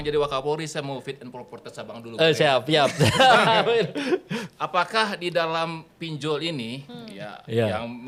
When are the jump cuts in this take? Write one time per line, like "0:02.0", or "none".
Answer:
none